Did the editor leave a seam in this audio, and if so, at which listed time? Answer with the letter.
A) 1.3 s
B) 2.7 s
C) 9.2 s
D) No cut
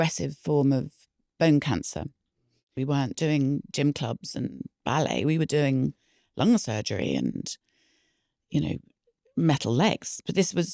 B